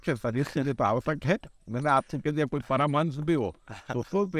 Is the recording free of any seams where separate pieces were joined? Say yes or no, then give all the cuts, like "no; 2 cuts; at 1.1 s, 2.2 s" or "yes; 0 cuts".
yes; 0 cuts